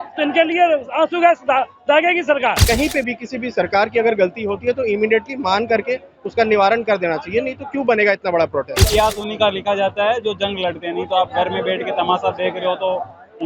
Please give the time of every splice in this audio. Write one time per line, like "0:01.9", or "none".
0:02.6
0:08.8